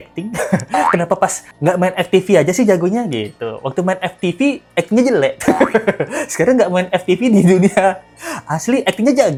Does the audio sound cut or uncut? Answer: uncut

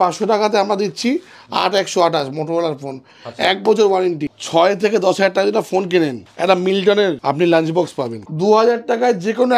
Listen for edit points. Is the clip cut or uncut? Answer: cut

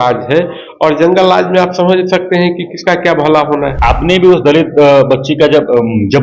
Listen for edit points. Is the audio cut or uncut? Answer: cut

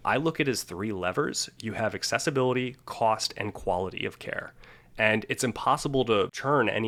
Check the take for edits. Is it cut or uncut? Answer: uncut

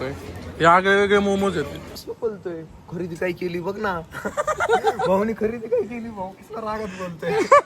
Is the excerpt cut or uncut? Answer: cut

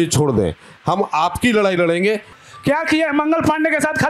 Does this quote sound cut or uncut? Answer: cut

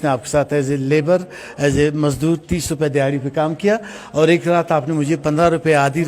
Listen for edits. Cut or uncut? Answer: uncut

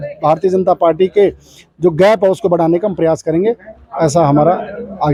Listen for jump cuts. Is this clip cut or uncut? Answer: uncut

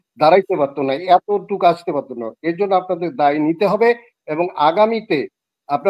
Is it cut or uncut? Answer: uncut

